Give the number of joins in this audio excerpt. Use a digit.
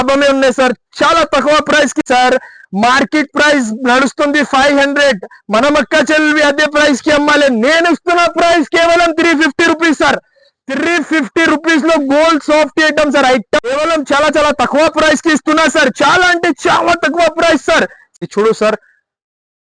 3